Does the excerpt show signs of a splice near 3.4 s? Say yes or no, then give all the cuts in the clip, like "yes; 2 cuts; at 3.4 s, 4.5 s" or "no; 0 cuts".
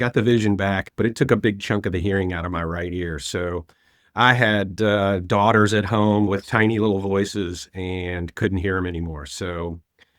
no; 2 cuts; at 0.9 s, 6.3 s